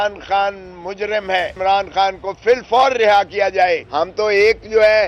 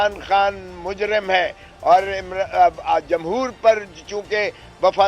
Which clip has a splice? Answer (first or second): first